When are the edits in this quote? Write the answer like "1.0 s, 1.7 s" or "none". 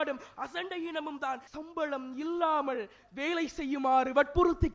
1.5 s